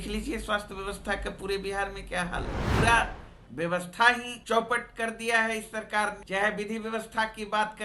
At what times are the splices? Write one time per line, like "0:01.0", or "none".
0:02.7
0:04.3
0:06.2